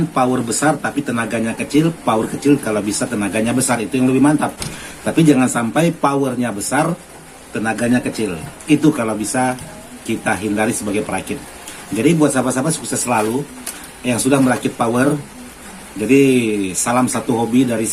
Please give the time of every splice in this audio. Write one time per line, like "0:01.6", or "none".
none